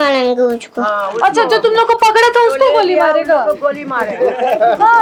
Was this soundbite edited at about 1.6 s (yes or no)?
no